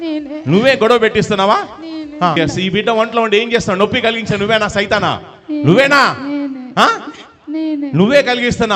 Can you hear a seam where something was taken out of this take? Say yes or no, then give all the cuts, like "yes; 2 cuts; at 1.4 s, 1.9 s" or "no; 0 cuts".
no; 0 cuts